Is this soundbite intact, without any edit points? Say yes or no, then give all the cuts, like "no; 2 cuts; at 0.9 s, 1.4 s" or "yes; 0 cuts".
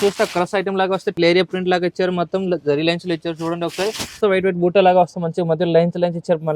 no; 2 cuts; at 1.1 s, 4.2 s